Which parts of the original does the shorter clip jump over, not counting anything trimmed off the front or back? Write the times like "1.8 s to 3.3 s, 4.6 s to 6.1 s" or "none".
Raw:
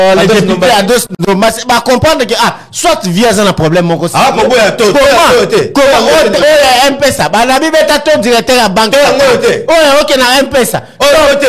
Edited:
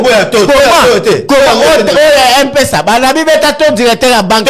none